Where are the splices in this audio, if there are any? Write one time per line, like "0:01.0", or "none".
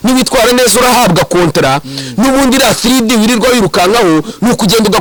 none